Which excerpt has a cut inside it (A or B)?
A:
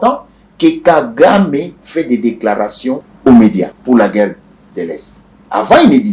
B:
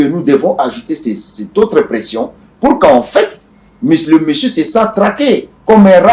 A